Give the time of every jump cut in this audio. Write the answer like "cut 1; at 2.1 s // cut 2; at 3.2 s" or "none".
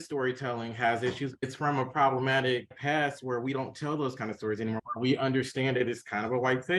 cut 1; at 4.8 s